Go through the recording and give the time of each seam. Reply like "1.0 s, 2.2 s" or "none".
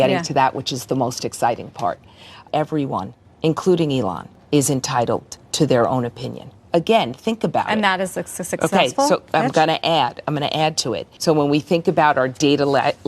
2.3 s, 6.5 s, 11.1 s